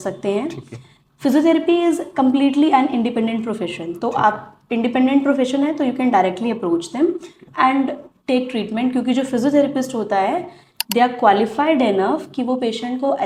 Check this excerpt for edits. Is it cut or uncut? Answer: uncut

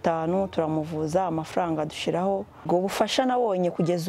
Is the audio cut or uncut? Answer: cut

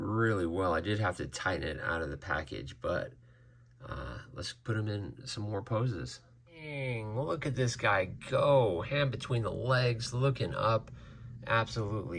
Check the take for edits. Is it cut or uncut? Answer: cut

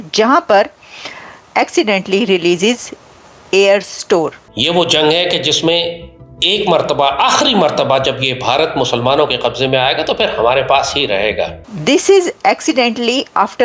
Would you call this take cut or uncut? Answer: cut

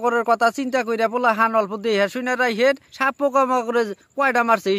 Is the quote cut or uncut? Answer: cut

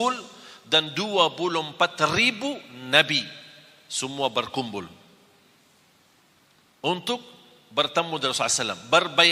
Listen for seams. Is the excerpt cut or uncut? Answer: uncut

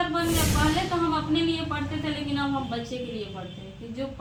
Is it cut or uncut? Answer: uncut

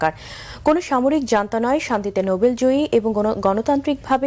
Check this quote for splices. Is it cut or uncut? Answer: cut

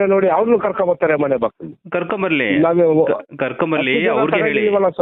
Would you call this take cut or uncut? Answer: uncut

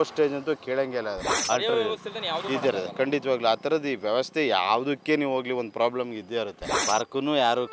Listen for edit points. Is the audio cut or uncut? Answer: cut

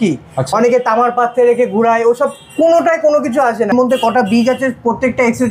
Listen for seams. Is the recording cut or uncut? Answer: cut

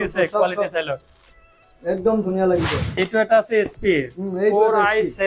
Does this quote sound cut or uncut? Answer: cut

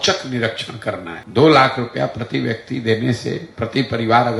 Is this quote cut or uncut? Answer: cut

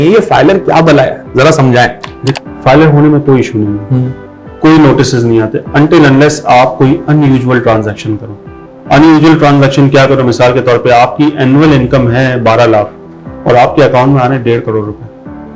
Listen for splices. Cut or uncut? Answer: uncut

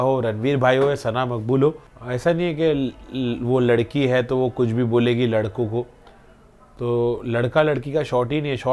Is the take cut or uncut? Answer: cut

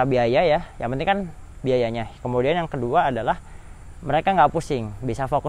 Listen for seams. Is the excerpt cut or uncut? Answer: uncut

